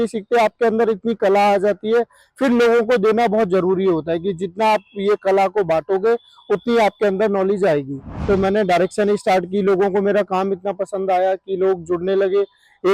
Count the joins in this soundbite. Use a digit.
1